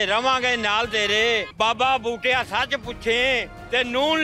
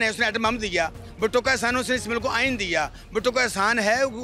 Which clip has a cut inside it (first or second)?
first